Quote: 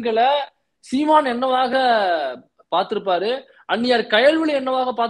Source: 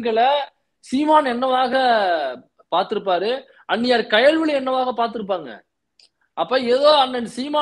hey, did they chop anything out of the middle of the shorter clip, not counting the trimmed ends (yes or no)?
no